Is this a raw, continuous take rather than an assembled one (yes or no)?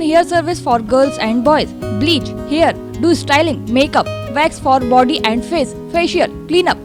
yes